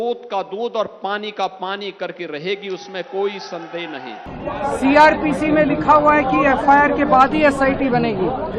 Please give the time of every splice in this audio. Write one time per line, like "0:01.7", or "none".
0:04.3